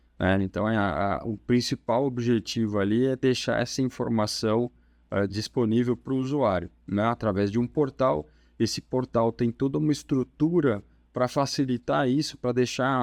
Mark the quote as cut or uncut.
uncut